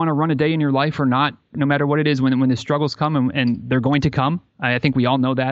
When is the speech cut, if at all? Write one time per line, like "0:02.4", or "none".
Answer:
none

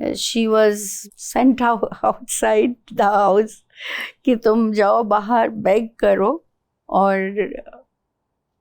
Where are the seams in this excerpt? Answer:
0:01.0

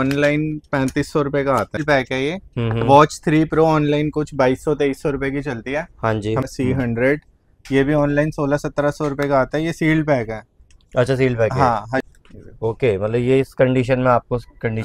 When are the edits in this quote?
0:01.8
0:06.4
0:12.0

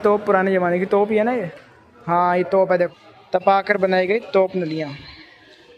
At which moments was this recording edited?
none

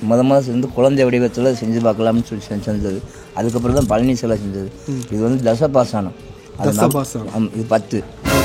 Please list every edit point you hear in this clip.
none

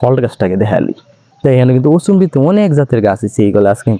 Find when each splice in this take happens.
0:01.2

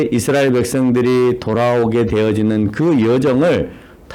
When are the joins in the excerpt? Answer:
none

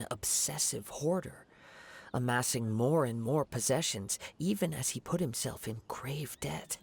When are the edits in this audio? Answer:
none

